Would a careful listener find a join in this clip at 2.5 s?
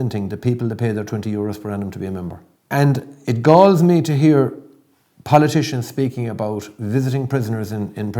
yes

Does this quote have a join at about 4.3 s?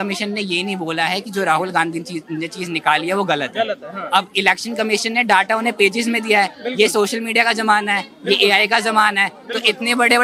no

